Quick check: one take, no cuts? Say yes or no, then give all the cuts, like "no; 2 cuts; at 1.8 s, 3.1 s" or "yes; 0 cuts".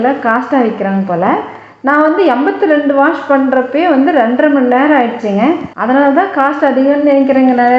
no; 1 cut; at 5.7 s